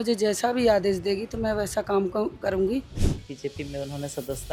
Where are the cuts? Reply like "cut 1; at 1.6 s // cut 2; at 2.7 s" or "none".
cut 1; at 3.0 s